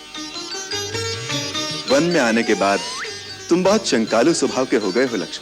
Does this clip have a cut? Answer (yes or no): no